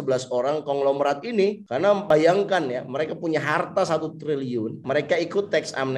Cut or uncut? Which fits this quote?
cut